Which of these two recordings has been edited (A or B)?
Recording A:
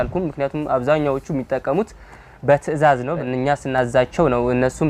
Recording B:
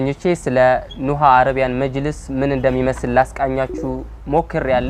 A